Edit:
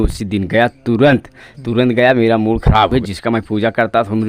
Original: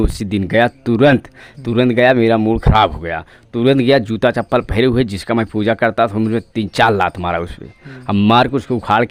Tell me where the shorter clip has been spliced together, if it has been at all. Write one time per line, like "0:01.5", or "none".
0:02.9